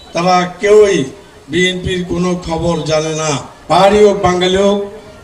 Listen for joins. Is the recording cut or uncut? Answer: cut